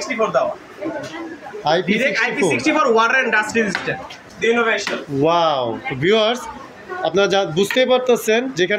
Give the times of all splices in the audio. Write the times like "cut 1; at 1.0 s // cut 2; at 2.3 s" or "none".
cut 1; at 4.2 s